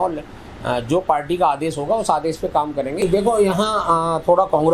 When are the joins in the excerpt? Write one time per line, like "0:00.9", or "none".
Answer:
0:03.0